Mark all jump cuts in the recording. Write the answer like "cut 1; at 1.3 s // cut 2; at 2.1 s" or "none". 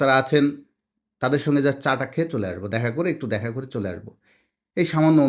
none

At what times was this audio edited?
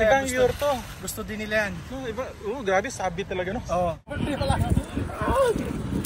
cut 1; at 4.0 s

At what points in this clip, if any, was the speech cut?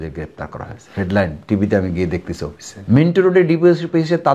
cut 1; at 2.7 s

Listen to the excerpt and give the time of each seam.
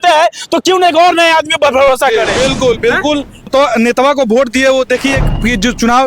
cut 1; at 3.5 s

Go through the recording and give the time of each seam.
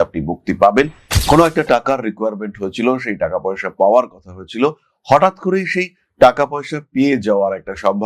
cut 1; at 1.1 s

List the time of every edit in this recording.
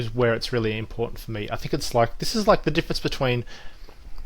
none

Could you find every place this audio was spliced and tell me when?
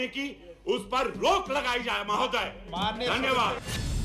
none

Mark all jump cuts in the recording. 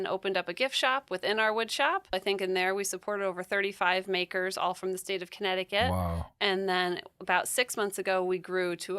cut 1; at 2.1 s

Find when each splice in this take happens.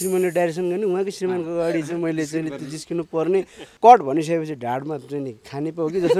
cut 1; at 3.7 s

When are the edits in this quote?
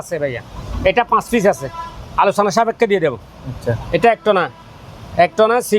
none

